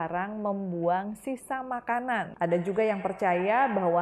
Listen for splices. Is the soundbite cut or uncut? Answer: cut